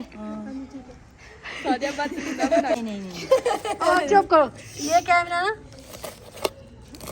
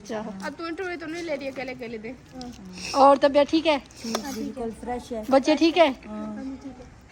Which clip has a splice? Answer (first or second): first